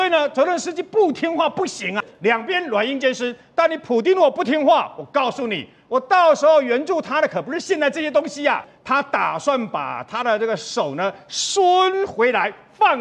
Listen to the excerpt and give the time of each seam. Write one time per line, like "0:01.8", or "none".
0:02.1
0:08.7